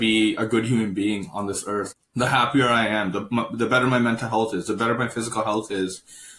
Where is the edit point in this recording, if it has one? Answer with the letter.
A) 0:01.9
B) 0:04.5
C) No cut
A